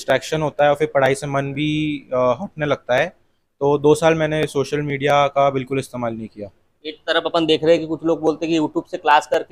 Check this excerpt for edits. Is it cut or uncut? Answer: uncut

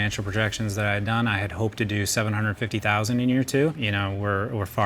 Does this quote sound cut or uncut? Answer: cut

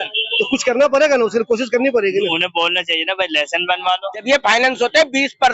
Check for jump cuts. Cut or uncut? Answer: cut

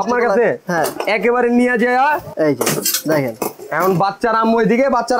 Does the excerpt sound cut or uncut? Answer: cut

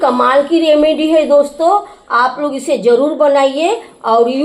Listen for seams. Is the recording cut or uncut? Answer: uncut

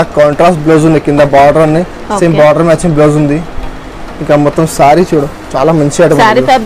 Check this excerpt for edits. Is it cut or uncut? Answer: uncut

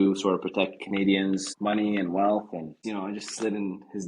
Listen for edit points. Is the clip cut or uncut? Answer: cut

